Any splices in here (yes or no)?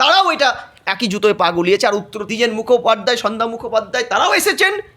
yes